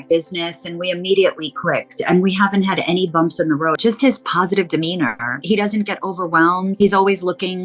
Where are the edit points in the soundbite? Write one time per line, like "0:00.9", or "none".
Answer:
0:03.8
0:05.4
0:06.7